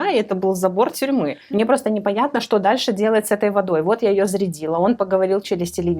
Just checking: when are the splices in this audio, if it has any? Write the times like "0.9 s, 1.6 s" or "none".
1.4 s